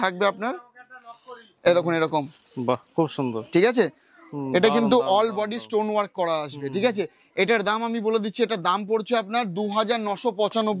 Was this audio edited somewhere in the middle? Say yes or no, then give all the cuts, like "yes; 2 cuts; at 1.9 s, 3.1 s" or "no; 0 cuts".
no; 0 cuts